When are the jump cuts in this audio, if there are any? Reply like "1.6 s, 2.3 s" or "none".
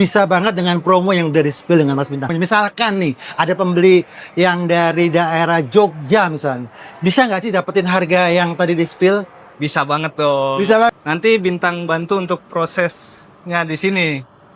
2.3 s, 9.4 s, 10.9 s